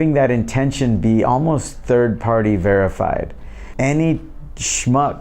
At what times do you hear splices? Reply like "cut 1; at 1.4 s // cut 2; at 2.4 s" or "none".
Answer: cut 1; at 3.6 s